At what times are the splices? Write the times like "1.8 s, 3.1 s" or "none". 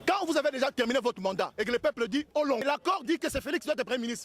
2.6 s